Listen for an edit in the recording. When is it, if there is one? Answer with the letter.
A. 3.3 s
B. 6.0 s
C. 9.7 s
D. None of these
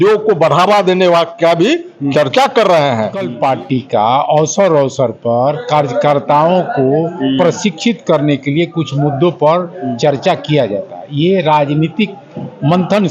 A